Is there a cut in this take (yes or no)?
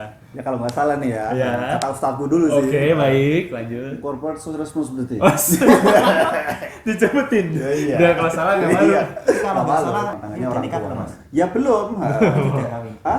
yes